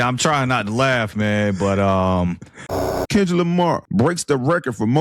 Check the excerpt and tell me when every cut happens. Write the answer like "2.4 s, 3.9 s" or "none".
2.9 s, 3.8 s